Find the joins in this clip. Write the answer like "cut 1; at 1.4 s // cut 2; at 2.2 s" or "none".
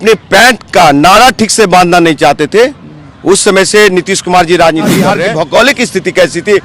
cut 1; at 5.1 s